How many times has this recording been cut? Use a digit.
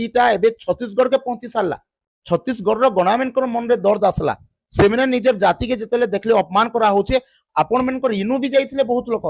0